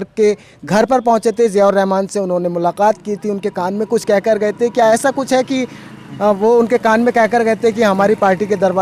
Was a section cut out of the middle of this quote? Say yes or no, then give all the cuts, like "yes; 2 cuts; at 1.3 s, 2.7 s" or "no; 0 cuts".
no; 0 cuts